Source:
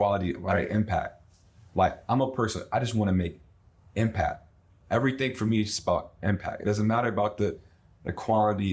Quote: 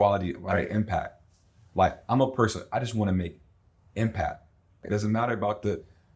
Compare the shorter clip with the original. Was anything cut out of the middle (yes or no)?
yes